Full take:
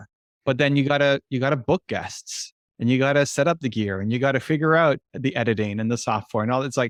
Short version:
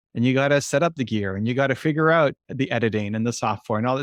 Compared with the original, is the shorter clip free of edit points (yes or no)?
yes